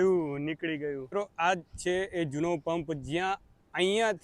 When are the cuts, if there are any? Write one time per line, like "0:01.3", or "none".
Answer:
0:01.0